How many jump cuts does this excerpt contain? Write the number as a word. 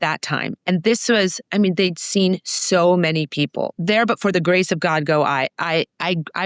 one